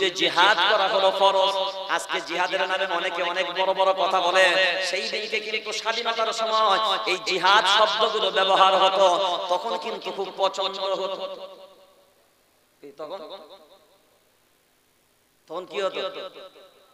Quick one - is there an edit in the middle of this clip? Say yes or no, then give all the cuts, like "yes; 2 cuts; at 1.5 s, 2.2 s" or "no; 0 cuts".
no; 0 cuts